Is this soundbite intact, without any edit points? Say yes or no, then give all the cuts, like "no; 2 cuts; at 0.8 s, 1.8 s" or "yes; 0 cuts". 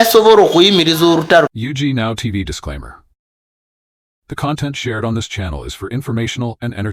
no; 1 cut; at 1.5 s